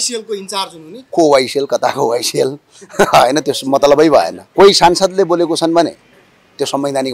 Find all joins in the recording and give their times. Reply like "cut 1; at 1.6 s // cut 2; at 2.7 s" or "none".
cut 1; at 4.4 s